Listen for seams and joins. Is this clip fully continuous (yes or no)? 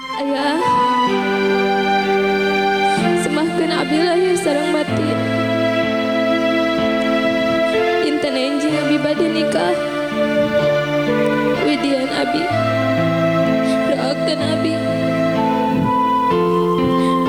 yes